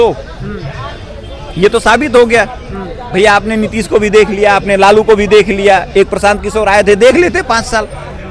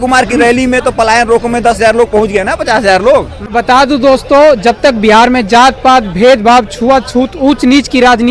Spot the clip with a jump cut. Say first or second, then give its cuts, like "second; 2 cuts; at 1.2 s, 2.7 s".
second; 1 cut; at 3.4 s